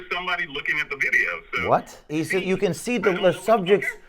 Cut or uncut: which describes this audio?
cut